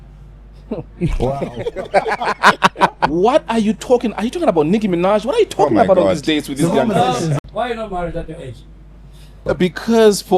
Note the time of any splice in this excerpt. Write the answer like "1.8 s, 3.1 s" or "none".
3.1 s, 7.4 s, 9.4 s